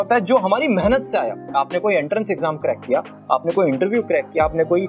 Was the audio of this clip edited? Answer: no; 0 cuts

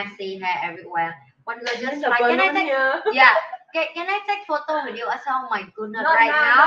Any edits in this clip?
no; 0 cuts

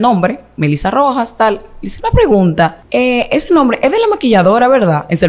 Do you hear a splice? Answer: yes; 1 cut; at 2.8 s

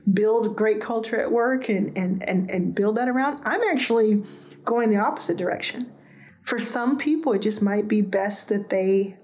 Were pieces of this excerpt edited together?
no; 0 cuts

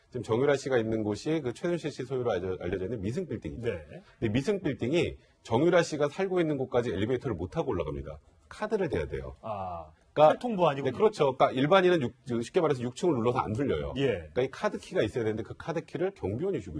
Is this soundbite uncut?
no; 1 cut; at 4.6 s

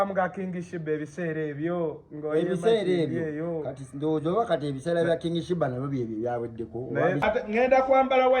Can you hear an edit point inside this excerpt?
yes; 1 cut; at 7.5 s

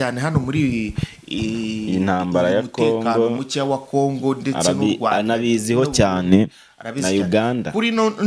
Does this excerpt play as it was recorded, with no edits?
yes; 0 cuts

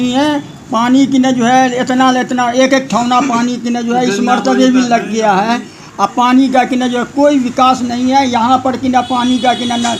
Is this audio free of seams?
yes; 0 cuts

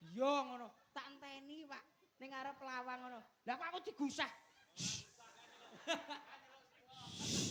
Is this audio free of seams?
yes; 0 cuts

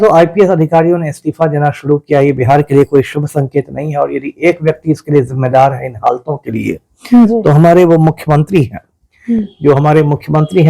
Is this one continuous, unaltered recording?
yes; 0 cuts

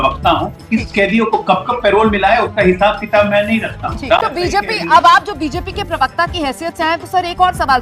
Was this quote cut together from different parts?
yes; 1 cut; at 4.2 s

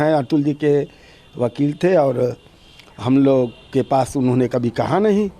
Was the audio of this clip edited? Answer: no; 0 cuts

